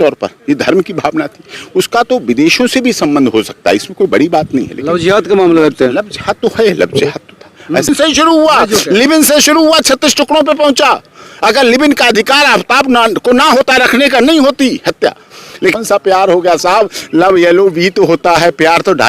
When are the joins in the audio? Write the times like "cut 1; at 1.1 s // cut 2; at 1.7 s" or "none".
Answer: cut 1; at 7.9 s // cut 2; at 15.7 s